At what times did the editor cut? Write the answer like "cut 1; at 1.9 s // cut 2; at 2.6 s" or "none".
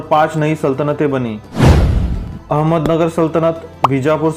none